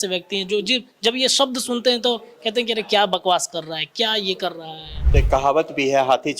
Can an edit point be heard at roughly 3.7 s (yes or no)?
no